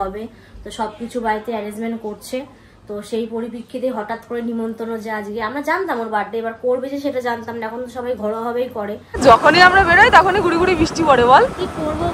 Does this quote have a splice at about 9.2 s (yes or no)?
yes